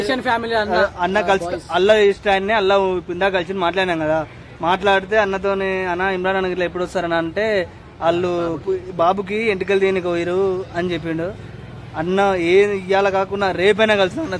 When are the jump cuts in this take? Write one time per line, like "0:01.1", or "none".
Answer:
none